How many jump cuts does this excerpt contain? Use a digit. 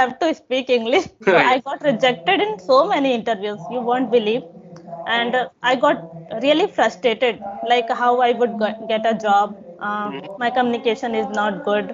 1